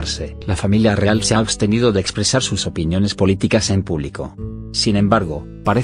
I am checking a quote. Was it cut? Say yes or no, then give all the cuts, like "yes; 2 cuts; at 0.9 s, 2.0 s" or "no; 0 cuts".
no; 0 cuts